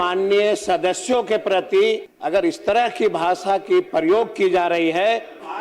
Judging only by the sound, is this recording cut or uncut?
cut